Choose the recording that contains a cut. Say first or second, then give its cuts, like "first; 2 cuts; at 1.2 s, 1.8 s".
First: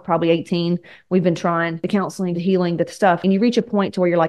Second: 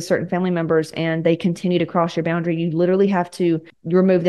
first; 2 cuts; at 2.1 s, 3.2 s